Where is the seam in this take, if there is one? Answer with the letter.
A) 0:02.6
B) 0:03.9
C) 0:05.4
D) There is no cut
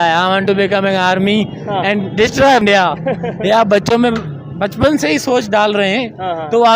A